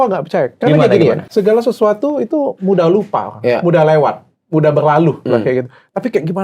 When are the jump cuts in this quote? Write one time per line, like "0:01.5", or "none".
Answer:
0:01.3